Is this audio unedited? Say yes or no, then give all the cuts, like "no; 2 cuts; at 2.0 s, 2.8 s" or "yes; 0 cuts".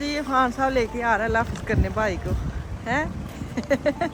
yes; 0 cuts